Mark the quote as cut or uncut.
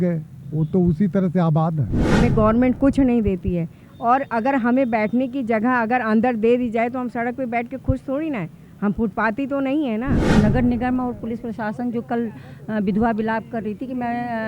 cut